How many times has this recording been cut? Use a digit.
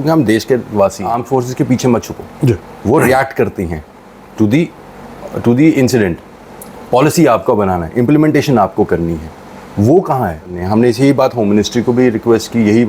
2